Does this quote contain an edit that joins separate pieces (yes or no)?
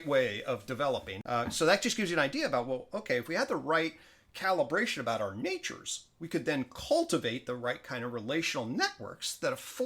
yes